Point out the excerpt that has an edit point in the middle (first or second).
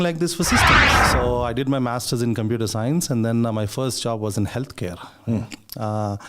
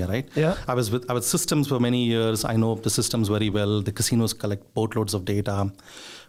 first